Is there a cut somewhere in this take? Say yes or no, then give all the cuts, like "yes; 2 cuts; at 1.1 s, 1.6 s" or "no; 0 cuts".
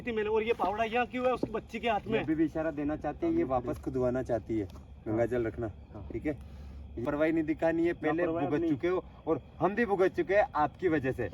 yes; 1 cut; at 7.0 s